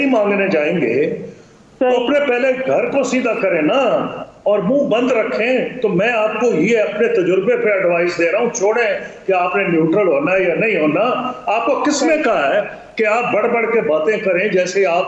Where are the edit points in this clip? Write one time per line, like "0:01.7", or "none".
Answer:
none